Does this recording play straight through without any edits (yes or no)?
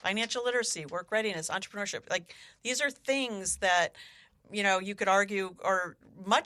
yes